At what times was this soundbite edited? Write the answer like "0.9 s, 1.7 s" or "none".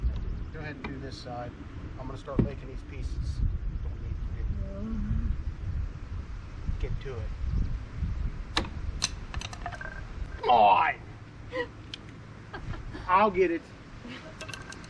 none